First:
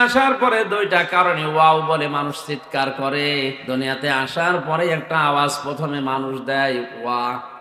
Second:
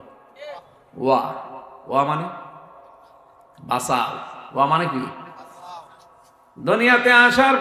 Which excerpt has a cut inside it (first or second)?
first